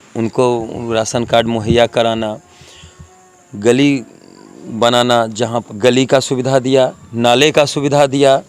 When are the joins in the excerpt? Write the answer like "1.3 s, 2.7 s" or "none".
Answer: 5.6 s